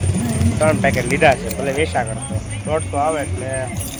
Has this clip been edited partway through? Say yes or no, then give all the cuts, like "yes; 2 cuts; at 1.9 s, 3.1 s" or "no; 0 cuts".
no; 0 cuts